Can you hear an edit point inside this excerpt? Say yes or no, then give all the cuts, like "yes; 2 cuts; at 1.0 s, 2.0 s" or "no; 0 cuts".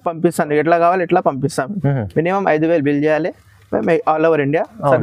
no; 0 cuts